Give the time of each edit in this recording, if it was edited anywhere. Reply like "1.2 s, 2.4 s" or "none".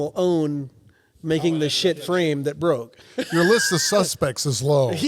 3.1 s